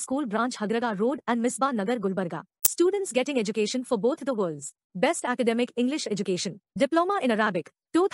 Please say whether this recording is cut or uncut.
uncut